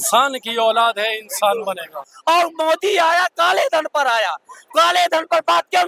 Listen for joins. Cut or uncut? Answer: cut